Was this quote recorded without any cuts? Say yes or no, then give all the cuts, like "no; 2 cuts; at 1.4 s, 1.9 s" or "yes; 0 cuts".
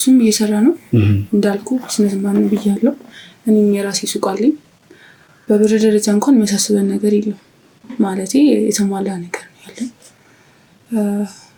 yes; 0 cuts